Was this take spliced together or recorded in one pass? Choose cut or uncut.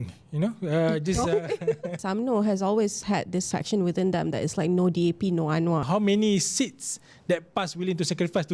cut